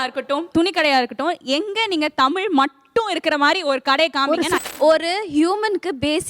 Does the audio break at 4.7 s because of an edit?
yes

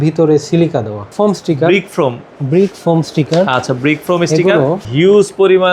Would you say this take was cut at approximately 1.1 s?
yes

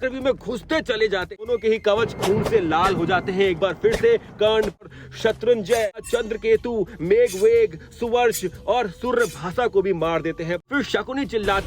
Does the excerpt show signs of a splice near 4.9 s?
yes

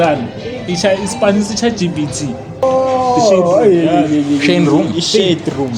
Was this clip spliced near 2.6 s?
yes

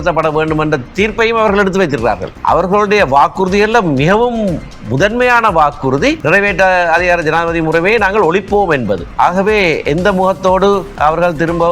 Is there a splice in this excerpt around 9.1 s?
yes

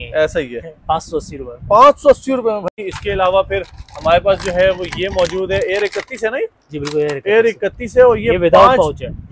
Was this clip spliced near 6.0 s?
no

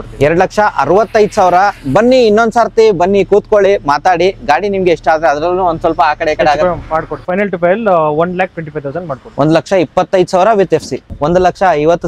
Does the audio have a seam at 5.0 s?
no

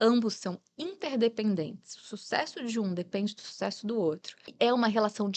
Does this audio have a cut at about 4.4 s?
yes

